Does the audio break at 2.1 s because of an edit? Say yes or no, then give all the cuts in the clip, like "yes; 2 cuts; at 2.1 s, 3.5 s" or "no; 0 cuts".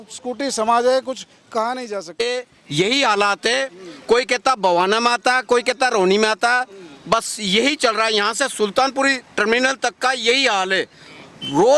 yes; 1 cut; at 2.1 s